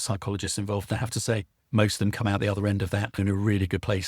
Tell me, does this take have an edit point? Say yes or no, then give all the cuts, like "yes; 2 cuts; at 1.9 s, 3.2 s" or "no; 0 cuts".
yes; 1 cut; at 3.2 s